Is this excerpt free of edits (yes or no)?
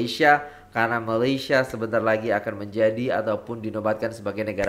yes